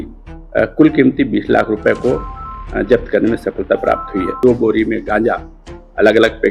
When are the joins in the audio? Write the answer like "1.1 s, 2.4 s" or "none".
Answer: 4.4 s